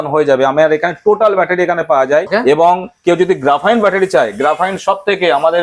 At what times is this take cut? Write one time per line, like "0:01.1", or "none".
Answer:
0:02.3